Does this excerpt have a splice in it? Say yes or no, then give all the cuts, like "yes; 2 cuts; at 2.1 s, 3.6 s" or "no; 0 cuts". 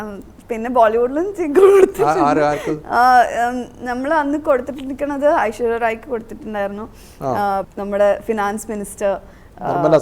yes; 1 cut; at 7.7 s